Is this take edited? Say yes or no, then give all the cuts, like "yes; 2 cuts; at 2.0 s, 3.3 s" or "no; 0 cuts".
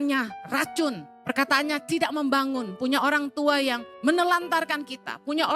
yes; 2 cuts; at 1.1 s, 3.9 s